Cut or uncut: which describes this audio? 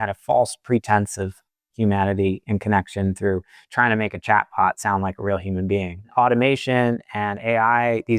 cut